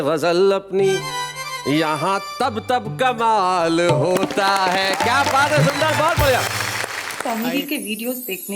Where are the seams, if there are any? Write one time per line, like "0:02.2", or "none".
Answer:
0:07.1